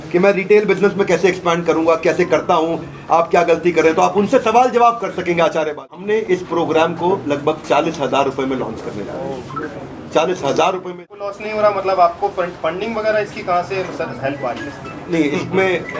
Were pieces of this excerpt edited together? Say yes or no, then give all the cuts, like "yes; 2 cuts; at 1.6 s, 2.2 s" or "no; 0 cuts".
yes; 2 cuts; at 6.1 s, 11.0 s